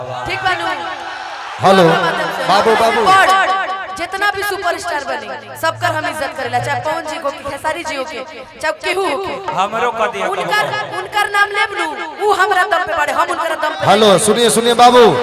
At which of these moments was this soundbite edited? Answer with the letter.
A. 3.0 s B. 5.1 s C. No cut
A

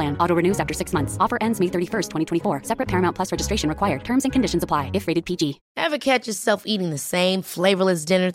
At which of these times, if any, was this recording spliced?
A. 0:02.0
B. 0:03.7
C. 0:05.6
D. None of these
C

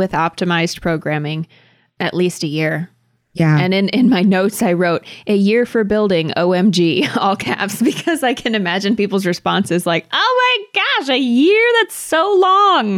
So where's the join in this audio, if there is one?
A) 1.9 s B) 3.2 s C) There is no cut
A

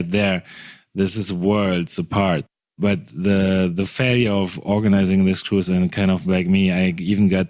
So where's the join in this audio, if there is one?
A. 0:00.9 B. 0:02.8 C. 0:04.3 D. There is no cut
B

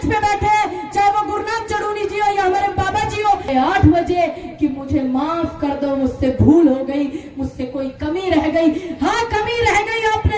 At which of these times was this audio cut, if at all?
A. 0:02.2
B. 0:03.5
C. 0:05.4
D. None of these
B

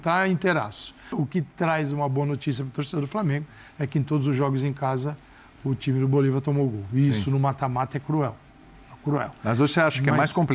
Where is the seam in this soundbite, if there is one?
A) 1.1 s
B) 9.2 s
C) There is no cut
A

